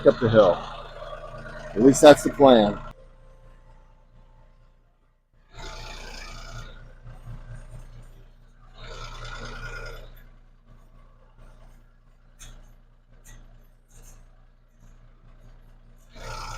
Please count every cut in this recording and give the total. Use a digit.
1